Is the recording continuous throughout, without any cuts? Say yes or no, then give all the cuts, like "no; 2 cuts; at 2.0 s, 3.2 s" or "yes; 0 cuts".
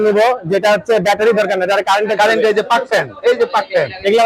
yes; 0 cuts